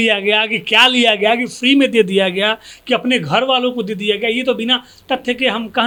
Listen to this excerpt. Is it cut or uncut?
uncut